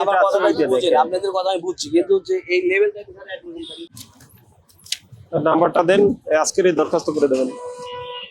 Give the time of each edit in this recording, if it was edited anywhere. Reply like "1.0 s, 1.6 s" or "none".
3.9 s